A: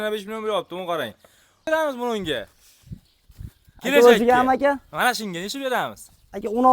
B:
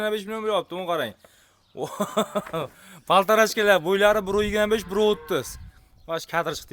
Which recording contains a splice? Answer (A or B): A